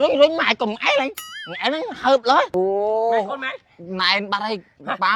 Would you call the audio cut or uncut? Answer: cut